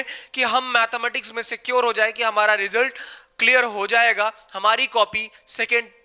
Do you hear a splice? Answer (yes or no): no